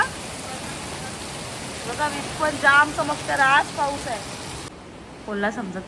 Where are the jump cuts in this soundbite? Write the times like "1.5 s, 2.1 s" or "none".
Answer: 4.6 s